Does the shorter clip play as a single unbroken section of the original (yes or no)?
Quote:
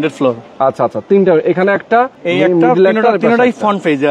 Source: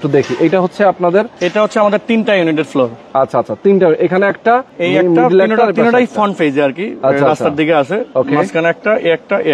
yes